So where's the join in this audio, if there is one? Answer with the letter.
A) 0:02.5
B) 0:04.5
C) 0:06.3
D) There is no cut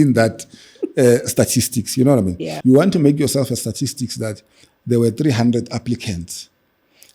A